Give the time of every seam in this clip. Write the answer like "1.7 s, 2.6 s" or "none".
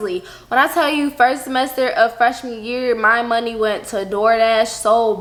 none